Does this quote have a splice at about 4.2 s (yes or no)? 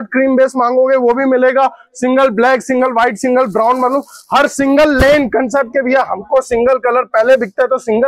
no